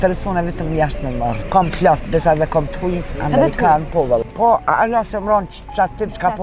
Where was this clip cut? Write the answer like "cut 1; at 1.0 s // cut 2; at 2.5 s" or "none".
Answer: cut 1; at 1.3 s // cut 2; at 4.2 s